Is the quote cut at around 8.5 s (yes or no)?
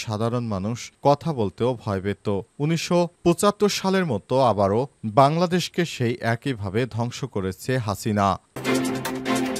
yes